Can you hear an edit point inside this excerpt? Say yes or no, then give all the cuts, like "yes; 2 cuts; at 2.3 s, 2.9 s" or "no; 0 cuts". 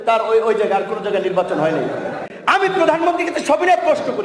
yes; 1 cut; at 2.2 s